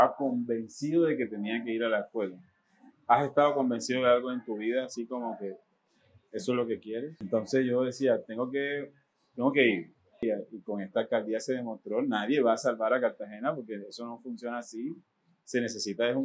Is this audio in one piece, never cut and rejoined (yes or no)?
no